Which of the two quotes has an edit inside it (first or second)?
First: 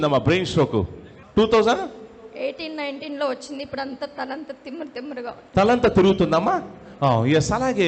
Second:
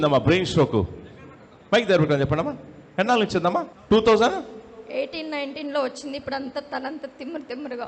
first